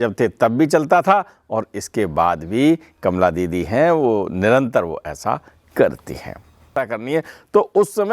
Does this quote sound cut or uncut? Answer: cut